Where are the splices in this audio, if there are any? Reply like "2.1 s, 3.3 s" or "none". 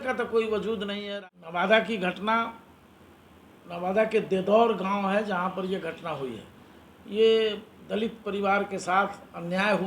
1.1 s